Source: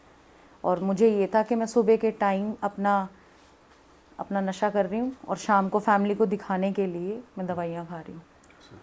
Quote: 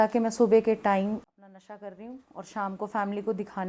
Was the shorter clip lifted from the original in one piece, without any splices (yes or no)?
no